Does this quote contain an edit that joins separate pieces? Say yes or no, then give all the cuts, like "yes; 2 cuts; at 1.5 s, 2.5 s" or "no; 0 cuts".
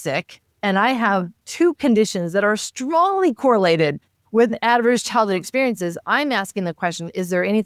no; 0 cuts